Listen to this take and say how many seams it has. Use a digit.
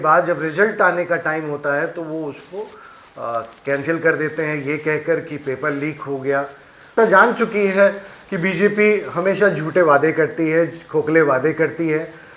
1